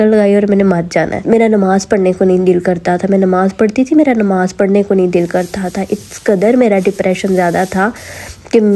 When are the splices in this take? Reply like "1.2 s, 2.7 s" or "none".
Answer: none